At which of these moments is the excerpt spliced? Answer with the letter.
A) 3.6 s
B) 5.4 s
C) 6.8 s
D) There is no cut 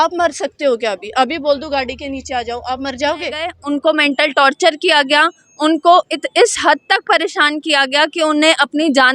A